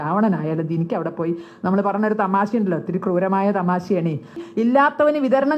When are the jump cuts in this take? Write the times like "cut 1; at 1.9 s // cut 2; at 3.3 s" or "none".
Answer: cut 1; at 4.4 s